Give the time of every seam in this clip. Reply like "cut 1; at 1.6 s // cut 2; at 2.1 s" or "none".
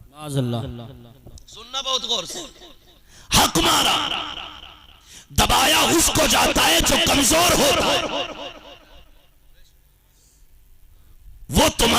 none